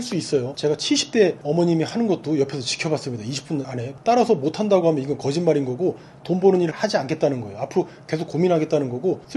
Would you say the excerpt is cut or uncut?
uncut